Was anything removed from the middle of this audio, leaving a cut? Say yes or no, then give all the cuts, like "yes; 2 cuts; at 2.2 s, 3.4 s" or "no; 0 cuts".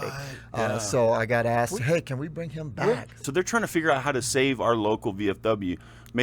yes; 1 cut; at 3.3 s